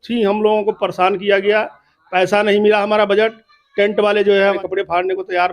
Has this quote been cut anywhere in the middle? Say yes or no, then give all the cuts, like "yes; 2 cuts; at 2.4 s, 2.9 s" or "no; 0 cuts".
yes; 1 cut; at 4.6 s